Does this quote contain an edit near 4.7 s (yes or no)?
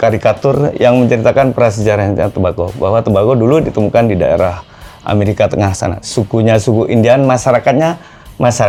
no